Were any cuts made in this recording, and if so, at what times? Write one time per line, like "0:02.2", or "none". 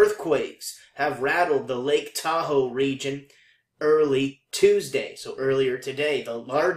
0:03.4